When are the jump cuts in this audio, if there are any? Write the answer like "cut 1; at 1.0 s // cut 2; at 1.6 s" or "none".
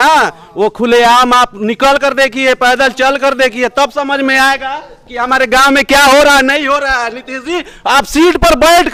none

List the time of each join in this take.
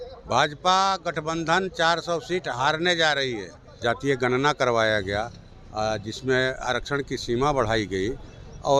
cut 1; at 3.8 s

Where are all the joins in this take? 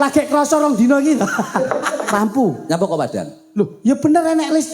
cut 1; at 2.0 s

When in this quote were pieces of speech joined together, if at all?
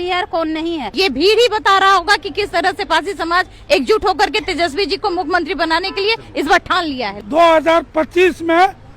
cut 1; at 0.9 s // cut 2; at 7.2 s

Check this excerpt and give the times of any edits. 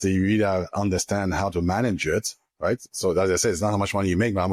none

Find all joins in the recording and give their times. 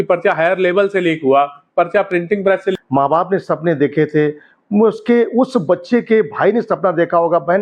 cut 1; at 2.7 s

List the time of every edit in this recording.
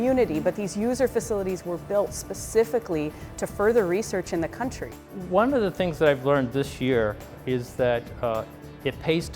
cut 1; at 5.1 s

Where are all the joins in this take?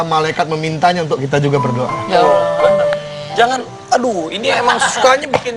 none

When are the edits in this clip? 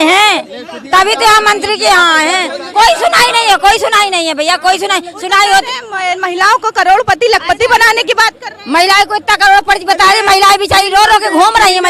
none

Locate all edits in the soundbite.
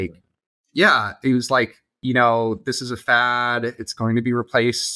cut 1; at 2.0 s

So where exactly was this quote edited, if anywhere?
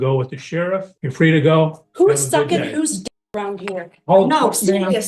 cut 1; at 1.0 s

